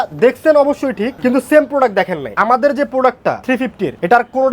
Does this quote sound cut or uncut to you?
cut